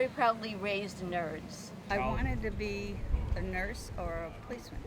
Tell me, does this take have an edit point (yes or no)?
yes